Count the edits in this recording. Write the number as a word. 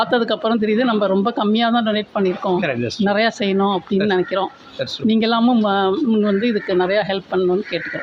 zero